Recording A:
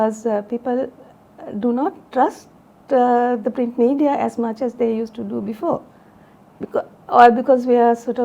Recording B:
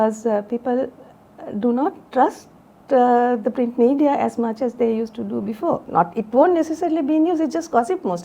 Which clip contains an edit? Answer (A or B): B